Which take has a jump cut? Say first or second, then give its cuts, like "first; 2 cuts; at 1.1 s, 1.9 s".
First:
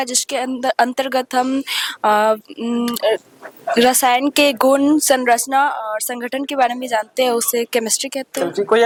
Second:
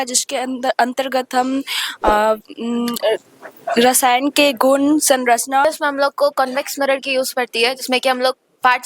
second; 1 cut; at 5.6 s